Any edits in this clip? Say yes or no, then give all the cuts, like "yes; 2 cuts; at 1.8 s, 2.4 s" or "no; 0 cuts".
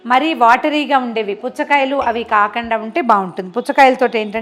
no; 0 cuts